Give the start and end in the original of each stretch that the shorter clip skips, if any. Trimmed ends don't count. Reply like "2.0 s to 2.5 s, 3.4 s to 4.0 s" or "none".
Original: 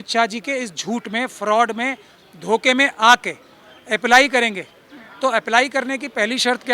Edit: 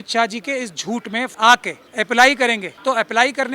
1.4 s to 3.3 s, 4.6 s to 5.1 s

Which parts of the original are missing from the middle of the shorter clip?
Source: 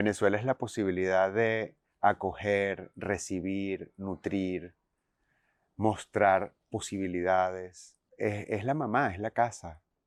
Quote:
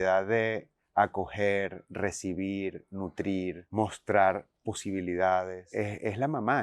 4.7 s to 5.7 s, 7.7 s to 8.1 s

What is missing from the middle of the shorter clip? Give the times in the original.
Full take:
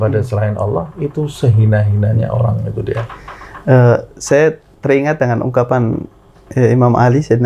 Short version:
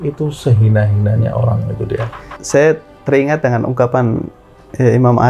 3.3 s to 4.1 s

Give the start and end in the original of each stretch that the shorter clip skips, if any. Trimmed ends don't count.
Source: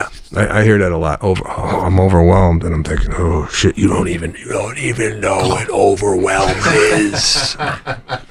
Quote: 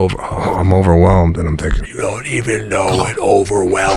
3.1 s to 4.3 s

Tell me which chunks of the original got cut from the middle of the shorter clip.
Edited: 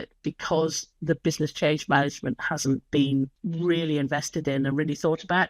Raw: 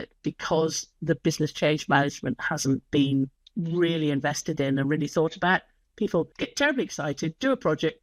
3.4 s to 3.5 s

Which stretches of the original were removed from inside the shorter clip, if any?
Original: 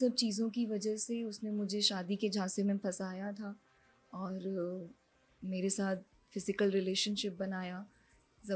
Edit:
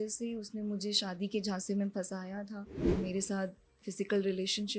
3.7 s to 5.3 s

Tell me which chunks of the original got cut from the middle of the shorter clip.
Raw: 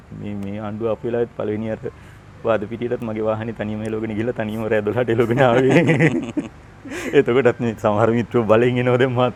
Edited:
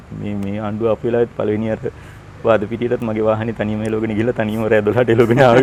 none

